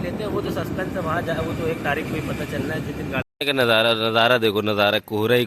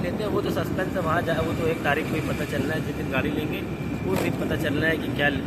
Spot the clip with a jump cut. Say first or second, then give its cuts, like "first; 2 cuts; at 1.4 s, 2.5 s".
first; 1 cut; at 3.2 s